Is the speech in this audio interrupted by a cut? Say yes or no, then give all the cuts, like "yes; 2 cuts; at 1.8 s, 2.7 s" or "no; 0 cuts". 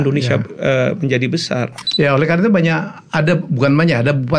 yes; 1 cut; at 1.8 s